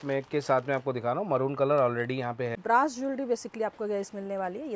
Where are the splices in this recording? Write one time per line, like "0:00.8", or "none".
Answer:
0:02.6